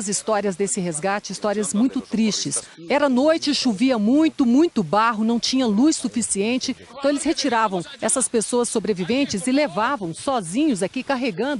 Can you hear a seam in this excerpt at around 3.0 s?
yes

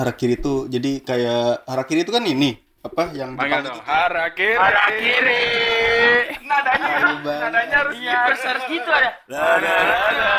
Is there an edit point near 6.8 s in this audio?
no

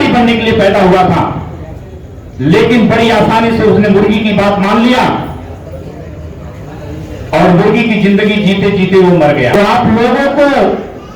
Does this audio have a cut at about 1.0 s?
no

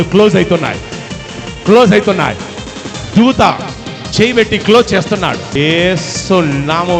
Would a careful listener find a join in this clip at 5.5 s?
yes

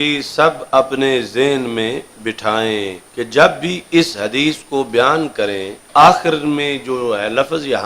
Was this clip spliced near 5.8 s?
yes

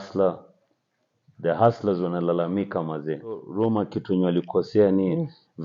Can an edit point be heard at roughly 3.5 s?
yes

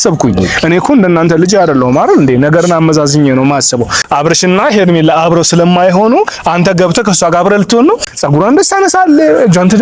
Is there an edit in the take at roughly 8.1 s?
yes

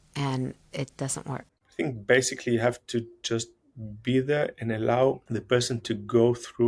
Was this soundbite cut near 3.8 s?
no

